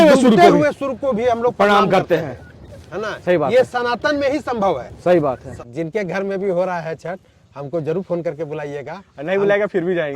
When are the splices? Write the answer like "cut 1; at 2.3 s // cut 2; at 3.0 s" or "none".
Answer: cut 1; at 5.6 s